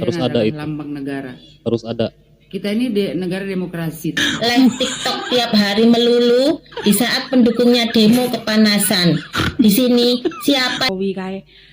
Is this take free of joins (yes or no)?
no